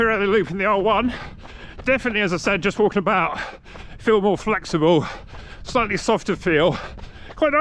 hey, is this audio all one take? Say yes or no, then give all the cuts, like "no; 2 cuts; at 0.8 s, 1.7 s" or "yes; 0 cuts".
yes; 0 cuts